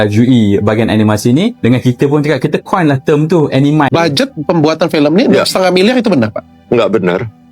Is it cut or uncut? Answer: cut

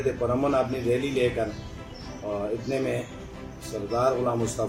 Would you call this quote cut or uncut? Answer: uncut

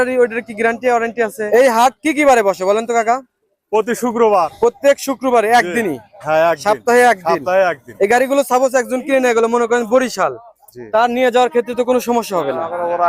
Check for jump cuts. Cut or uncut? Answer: cut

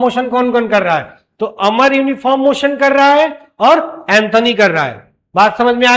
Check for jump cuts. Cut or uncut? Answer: uncut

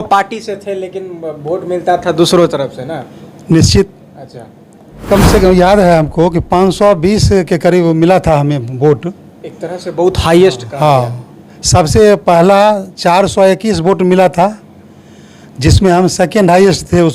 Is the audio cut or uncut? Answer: cut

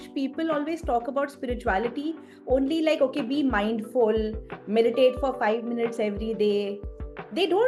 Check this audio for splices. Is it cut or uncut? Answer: uncut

